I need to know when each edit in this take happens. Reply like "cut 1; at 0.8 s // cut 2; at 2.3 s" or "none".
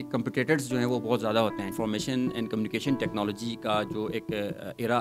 cut 1; at 1.7 s